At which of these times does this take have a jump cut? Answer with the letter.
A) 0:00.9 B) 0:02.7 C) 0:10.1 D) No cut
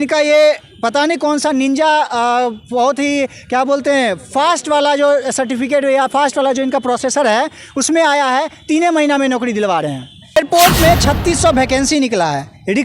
C